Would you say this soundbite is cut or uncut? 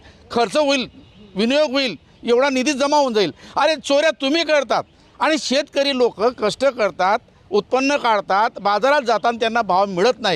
uncut